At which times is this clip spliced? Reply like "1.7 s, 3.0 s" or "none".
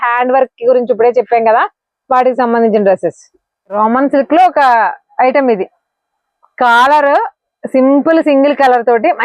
3.7 s